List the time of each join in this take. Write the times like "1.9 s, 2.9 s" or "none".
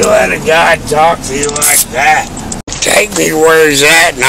2.7 s